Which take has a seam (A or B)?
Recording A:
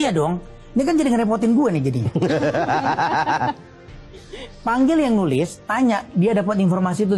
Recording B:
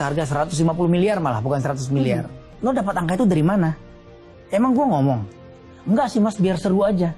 B